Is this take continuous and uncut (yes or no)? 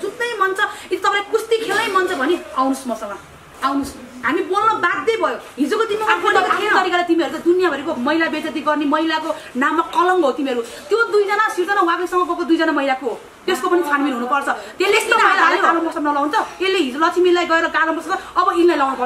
no